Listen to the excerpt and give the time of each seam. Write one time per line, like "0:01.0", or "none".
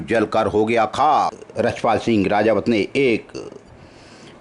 0:01.4